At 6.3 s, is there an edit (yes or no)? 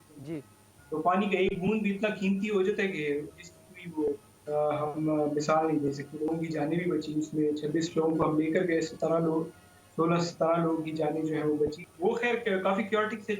yes